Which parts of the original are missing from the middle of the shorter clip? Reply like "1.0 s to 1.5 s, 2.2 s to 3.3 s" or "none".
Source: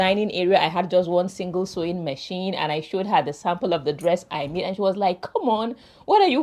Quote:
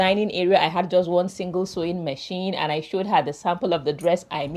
none